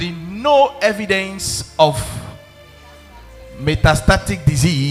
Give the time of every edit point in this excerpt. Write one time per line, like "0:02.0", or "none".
none